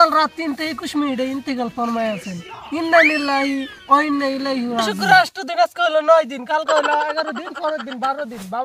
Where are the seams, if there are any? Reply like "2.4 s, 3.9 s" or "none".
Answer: 5.0 s